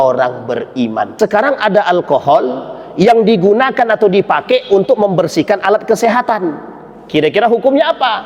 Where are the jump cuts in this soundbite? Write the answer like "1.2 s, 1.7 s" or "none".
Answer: 1.1 s